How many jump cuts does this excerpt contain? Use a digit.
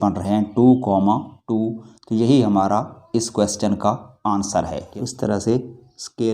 1